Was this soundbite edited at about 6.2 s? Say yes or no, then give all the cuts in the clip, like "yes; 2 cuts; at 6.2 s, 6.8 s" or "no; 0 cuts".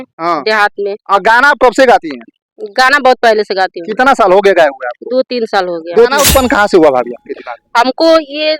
yes; 1 cut; at 6.2 s